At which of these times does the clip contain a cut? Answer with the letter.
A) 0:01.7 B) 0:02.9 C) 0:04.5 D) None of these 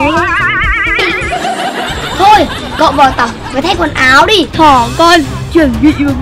C